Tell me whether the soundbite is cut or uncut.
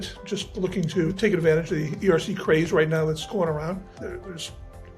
cut